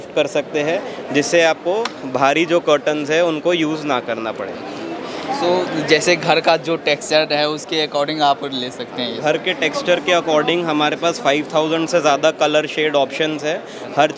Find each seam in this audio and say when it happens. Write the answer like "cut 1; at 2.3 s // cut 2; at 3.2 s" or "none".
none

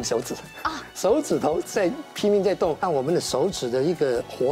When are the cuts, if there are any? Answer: cut 1; at 2.8 s

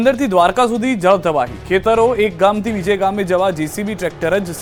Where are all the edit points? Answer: none

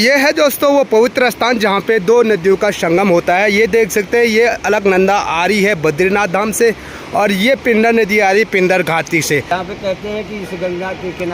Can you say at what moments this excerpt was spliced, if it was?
cut 1; at 9.5 s

